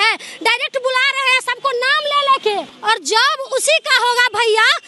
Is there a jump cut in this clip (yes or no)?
yes